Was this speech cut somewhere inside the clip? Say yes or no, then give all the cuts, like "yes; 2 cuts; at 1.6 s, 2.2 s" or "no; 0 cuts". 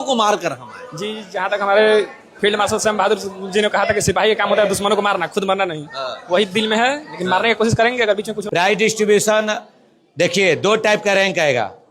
yes; 1 cut; at 8.3 s